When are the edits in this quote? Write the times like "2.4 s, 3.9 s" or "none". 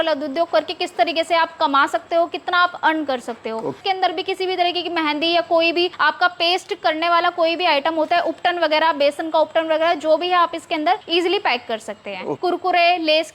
3.8 s, 5.9 s, 11.0 s, 12.3 s